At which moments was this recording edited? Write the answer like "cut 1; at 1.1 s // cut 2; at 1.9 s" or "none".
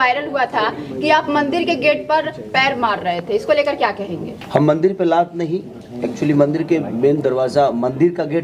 cut 1; at 4.3 s

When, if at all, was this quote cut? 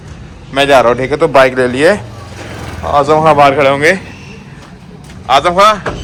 none

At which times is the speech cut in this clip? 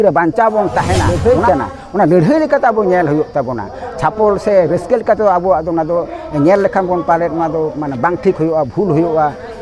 cut 1; at 1.1 s

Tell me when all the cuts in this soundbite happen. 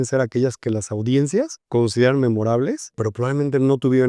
cut 1; at 1.6 s // cut 2; at 3.0 s

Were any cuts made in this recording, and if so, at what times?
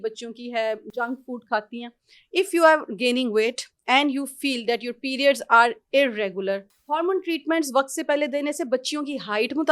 cut 1; at 6.7 s

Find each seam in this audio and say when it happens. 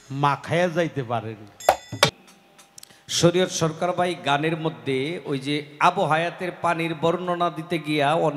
cut 1; at 2.2 s

